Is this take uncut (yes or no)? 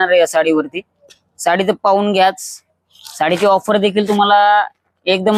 yes